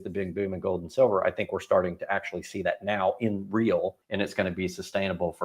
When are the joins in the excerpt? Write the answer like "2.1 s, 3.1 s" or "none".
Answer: 4.0 s